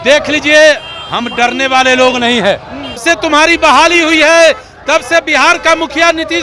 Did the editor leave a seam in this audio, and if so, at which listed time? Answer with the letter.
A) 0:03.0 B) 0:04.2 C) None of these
A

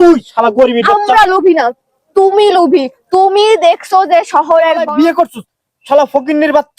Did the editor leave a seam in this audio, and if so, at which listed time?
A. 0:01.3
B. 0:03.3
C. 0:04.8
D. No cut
C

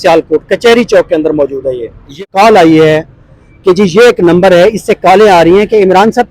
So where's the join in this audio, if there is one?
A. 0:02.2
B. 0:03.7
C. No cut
A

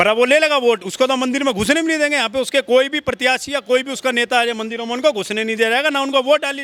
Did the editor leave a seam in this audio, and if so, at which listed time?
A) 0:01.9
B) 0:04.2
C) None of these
C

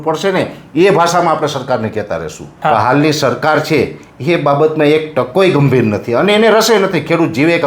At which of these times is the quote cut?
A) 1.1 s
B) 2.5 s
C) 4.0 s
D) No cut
B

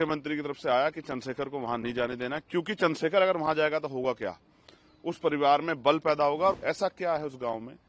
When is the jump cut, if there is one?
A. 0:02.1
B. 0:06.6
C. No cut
B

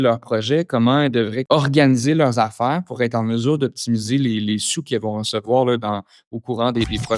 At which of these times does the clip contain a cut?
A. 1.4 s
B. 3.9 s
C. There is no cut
A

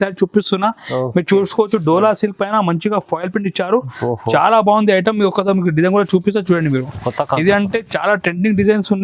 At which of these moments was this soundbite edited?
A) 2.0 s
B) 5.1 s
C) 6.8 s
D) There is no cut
D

